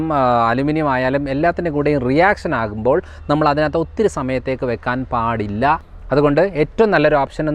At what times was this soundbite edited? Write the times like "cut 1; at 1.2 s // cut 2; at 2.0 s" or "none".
cut 1; at 5.9 s